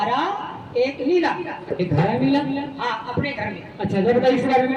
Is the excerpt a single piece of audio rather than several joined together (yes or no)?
yes